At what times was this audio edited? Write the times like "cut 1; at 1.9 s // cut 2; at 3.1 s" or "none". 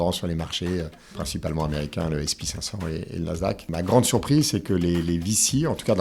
cut 1; at 1.2 s // cut 2; at 3.7 s